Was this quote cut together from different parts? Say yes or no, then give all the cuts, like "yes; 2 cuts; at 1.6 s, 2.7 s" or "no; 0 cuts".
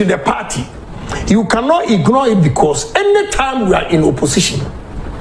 no; 0 cuts